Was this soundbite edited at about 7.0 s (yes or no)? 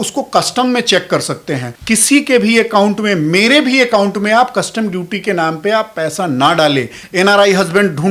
yes